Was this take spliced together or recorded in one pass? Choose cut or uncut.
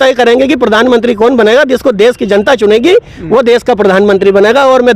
uncut